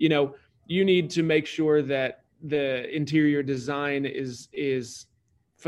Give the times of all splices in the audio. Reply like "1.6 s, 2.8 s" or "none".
none